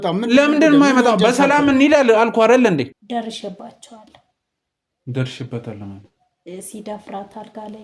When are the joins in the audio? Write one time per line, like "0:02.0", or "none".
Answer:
0:03.0